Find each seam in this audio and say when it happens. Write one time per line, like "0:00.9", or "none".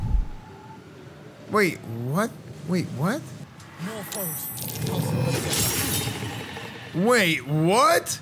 0:01.4
0:02.5
0:03.5